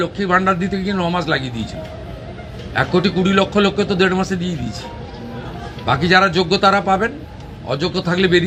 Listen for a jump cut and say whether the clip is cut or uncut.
uncut